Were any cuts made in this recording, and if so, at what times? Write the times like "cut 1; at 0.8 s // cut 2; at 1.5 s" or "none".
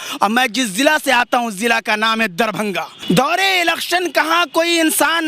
cut 1; at 2.9 s